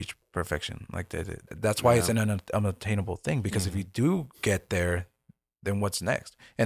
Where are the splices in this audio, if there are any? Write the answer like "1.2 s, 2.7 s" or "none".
1.5 s